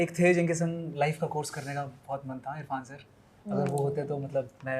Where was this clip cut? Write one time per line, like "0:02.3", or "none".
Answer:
none